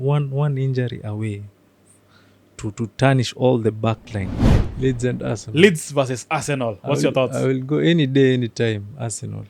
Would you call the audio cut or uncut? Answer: cut